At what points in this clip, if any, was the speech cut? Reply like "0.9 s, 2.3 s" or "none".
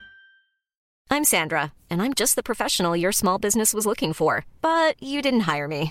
0.9 s